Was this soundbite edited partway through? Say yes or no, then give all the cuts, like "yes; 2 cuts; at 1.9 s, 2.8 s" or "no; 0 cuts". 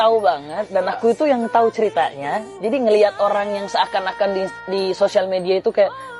no; 0 cuts